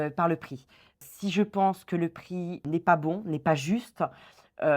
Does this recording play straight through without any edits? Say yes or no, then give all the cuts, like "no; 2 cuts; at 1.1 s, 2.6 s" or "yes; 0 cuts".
no; 2 cuts; at 1.0 s, 2.6 s